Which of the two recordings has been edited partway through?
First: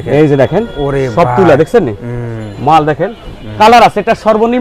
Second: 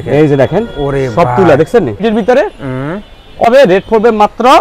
second; 2 cuts; at 2.0 s, 3.5 s

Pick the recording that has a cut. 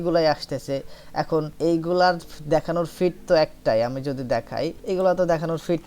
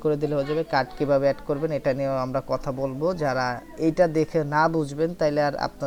first; 2 cuts; at 1.5 s, 4.8 s

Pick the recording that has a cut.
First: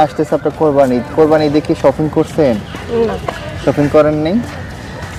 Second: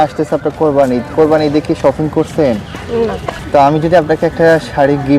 second; 1 cut; at 3.3 s

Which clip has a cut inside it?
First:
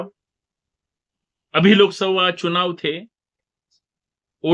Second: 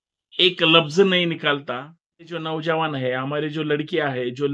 second; 1 cut; at 2.5 s

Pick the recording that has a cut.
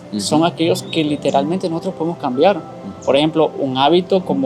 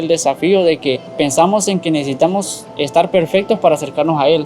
second; 1 cut; at 1.1 s

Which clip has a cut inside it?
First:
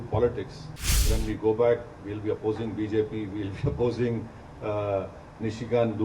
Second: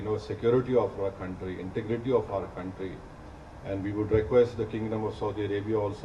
first; 1 cut; at 1.0 s

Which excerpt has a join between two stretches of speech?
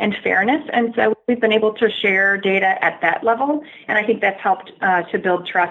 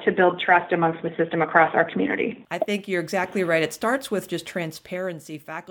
second; 1 cut; at 2.4 s

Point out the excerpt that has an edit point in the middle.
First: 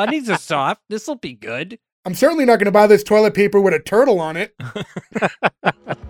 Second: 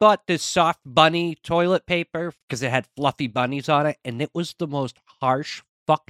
second; 1 cut; at 2.3 s

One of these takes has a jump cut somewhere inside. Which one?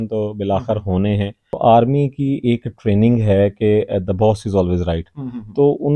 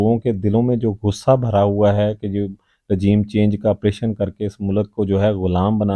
first; 1 cut; at 1.4 s

